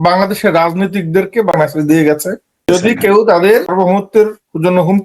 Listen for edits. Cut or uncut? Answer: cut